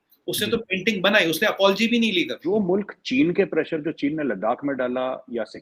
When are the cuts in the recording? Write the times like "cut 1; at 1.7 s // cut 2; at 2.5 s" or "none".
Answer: cut 1; at 2.6 s